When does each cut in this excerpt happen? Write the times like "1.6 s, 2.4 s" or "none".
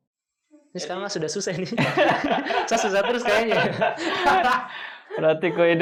none